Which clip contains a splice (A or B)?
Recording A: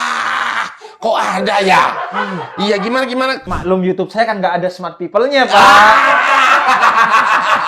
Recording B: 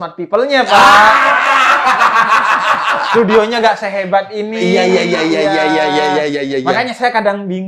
A